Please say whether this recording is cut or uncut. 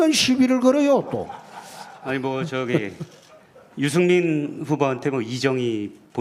uncut